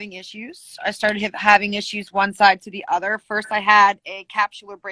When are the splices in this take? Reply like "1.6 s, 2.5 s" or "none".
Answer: none

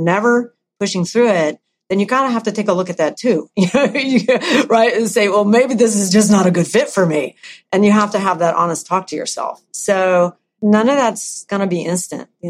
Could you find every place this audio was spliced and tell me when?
10.6 s, 11.5 s

